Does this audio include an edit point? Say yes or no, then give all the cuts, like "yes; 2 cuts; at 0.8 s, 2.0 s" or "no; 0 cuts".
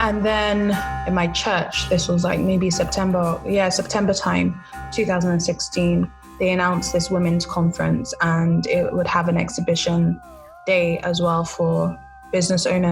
yes; 1 cut; at 0.9 s